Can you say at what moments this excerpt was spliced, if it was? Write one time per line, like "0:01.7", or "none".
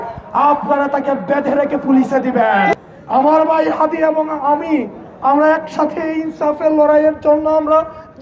0:02.7